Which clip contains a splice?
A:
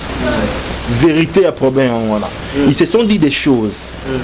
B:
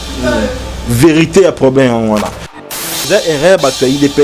B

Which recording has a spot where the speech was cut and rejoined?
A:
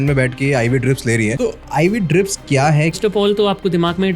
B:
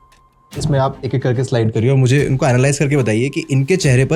A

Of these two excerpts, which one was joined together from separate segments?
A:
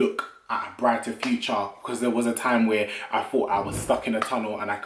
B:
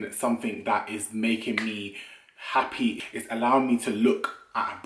B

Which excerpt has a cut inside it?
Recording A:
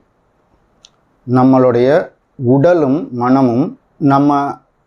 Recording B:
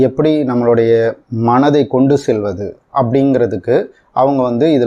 A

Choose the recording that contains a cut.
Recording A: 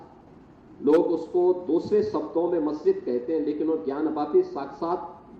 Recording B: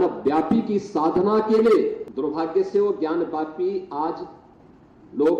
B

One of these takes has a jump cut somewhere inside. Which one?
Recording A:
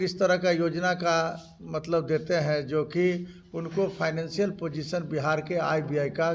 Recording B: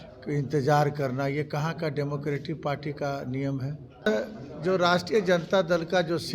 B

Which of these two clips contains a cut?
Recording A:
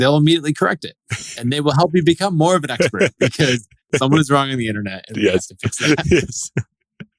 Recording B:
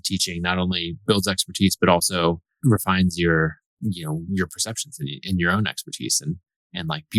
B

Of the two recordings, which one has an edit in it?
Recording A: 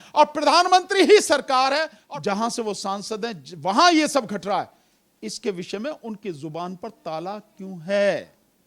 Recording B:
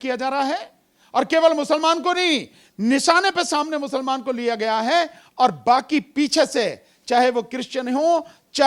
A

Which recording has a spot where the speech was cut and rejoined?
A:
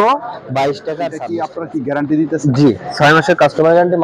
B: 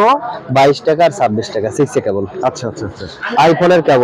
A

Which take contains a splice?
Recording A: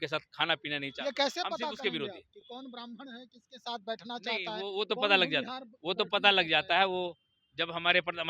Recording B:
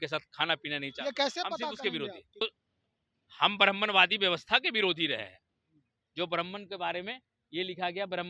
B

